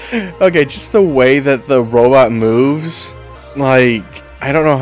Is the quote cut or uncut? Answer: uncut